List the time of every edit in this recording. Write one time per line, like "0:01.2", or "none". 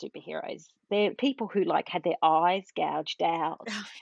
0:01.1